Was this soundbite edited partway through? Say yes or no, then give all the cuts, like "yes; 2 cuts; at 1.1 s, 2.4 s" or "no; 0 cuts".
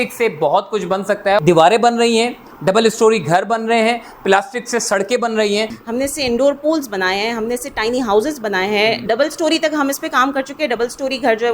yes; 3 cuts; at 1.4 s, 5.8 s, 9.1 s